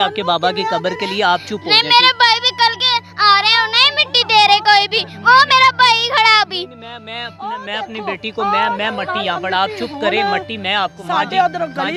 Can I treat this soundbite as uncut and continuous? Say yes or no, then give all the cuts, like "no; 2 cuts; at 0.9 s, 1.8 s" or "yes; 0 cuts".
yes; 0 cuts